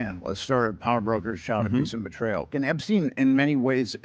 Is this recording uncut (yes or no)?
no